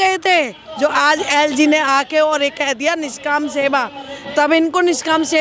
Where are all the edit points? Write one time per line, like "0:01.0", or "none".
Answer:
none